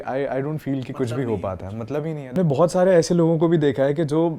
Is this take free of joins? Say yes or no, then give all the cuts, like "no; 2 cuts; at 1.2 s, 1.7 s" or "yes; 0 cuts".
no; 1 cut; at 2.3 s